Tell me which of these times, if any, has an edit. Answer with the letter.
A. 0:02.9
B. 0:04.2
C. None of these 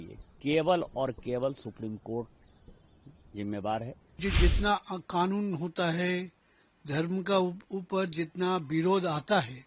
B